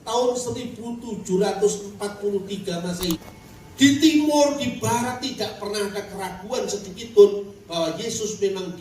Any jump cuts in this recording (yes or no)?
yes